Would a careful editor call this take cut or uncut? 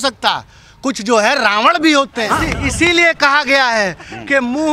cut